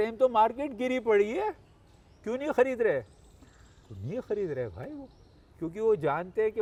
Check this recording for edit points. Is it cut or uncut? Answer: uncut